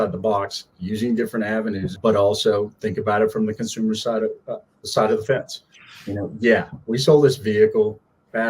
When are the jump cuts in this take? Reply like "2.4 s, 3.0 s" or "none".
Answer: 2.0 s